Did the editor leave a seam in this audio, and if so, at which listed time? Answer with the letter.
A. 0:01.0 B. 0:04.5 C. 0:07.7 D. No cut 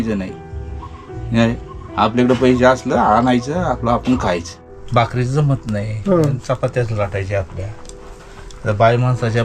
B